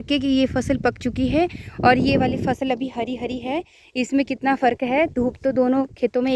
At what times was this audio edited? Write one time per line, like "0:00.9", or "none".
none